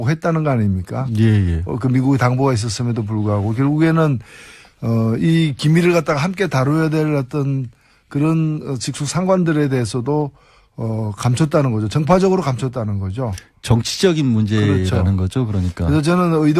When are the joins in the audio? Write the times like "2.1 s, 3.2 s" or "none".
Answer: 15.3 s